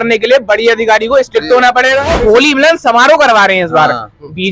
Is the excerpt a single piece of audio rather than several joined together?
no; 1 cut; at 2.1 s

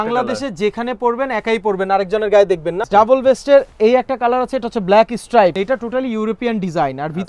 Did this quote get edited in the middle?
yes; 2 cuts; at 2.8 s, 5.5 s

